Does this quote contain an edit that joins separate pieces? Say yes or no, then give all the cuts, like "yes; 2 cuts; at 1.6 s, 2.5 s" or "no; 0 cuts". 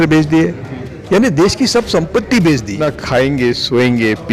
yes; 1 cut; at 2.8 s